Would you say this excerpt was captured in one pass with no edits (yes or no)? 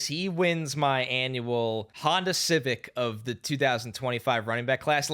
no